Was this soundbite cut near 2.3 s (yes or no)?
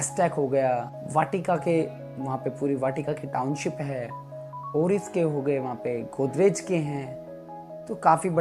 no